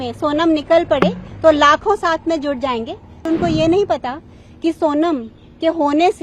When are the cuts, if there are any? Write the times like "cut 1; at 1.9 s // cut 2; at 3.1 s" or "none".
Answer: cut 1; at 3.2 s